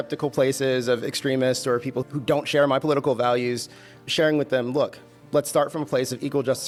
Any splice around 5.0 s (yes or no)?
no